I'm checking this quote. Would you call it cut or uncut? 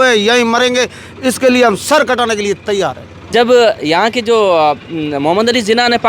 cut